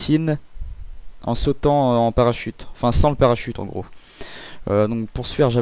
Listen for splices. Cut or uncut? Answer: cut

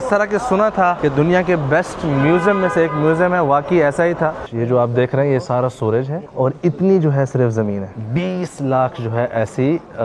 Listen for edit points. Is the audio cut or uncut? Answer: cut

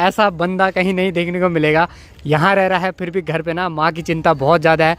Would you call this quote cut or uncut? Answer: uncut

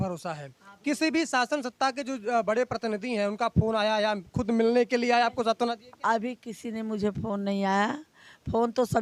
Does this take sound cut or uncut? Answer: uncut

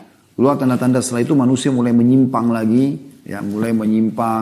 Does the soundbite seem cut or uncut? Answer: uncut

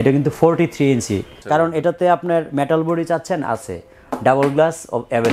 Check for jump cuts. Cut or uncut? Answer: cut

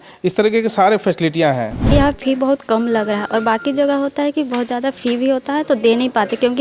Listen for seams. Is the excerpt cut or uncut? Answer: cut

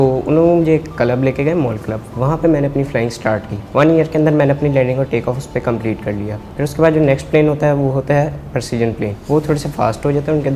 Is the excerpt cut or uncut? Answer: cut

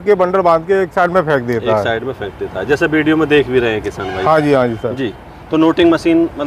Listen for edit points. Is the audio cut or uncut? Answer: uncut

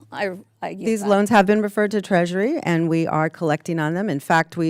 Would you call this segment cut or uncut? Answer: uncut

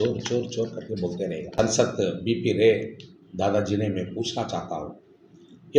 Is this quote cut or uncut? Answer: cut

